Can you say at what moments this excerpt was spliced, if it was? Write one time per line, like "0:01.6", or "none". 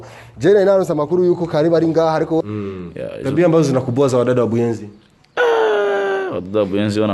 0:02.4